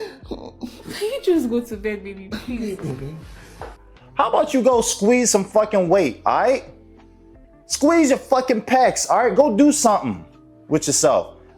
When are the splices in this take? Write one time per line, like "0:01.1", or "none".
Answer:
0:03.6